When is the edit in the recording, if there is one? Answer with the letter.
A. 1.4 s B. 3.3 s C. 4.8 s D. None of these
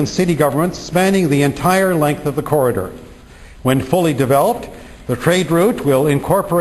B